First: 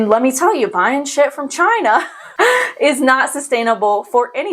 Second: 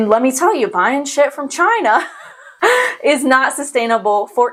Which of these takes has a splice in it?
first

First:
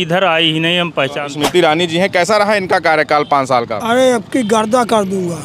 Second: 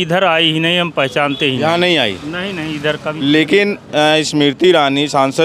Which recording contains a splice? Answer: first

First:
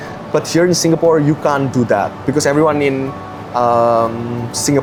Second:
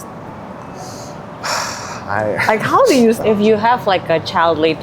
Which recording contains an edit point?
second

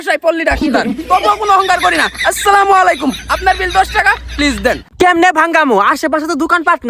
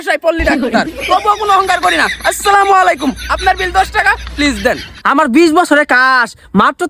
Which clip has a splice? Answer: first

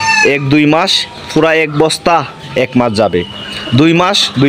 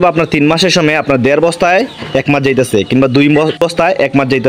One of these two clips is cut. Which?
second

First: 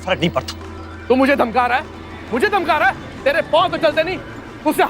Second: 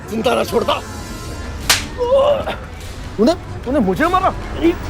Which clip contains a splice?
first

